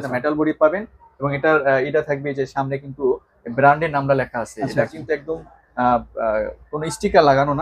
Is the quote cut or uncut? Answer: uncut